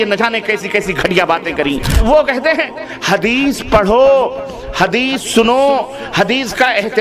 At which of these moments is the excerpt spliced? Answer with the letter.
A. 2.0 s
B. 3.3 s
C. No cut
A